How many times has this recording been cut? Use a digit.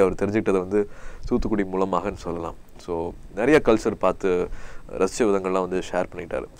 0